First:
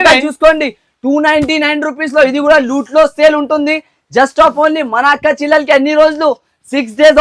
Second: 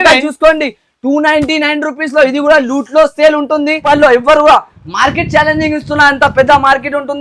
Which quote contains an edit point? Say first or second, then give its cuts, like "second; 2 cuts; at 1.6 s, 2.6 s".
second; 1 cut; at 3.8 s